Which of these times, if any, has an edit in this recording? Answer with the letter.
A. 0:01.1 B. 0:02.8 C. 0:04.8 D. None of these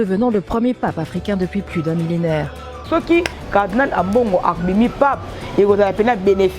B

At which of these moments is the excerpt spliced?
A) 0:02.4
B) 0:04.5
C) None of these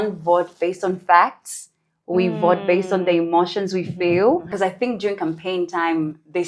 B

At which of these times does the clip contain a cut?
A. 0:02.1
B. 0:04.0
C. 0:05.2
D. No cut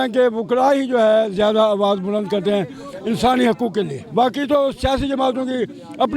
B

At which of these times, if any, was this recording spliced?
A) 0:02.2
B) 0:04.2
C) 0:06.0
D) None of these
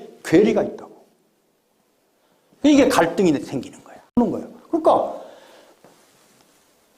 B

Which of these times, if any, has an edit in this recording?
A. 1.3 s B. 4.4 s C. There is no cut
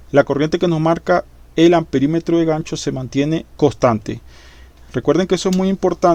C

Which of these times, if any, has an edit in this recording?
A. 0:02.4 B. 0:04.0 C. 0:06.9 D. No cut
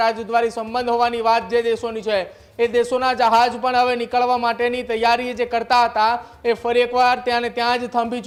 D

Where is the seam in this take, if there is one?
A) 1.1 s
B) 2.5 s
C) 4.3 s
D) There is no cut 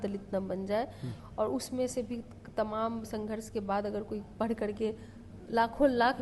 A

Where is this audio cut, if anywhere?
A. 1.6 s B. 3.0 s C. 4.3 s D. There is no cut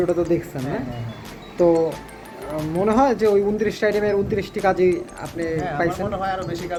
D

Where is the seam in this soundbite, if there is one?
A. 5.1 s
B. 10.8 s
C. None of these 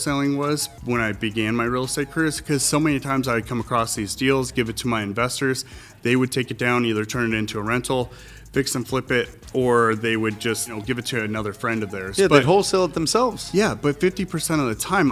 B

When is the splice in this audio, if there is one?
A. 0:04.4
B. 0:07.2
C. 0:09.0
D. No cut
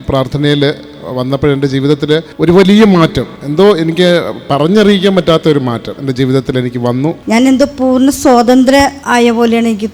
B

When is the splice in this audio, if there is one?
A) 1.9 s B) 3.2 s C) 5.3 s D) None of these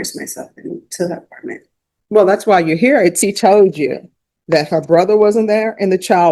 B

